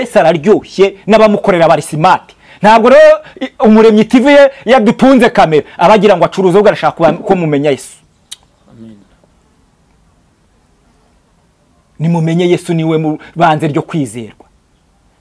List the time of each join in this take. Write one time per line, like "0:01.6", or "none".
none